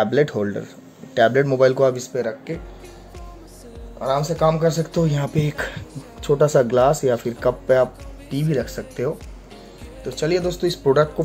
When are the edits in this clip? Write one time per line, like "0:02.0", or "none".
none